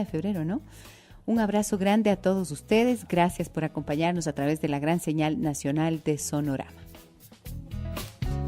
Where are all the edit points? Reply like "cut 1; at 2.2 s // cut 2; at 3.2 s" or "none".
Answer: cut 1; at 6.0 s